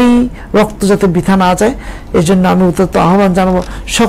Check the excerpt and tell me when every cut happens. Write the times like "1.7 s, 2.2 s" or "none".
none

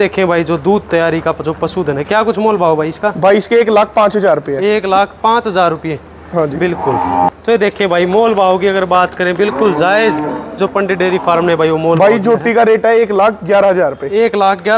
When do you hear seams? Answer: 7.3 s

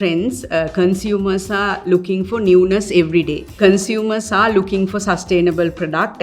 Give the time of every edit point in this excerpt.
3.6 s

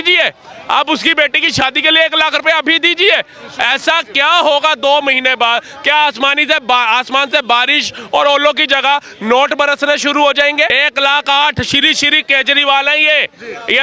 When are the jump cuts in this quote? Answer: 10.7 s

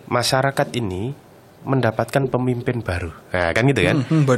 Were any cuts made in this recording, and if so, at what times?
none

